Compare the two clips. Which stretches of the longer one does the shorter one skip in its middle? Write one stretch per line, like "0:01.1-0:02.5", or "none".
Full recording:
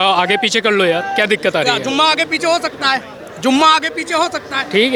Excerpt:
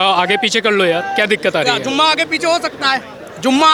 none